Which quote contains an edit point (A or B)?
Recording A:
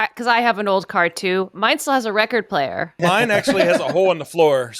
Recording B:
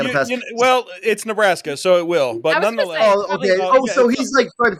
A